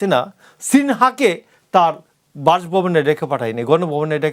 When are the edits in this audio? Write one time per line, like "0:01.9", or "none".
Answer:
none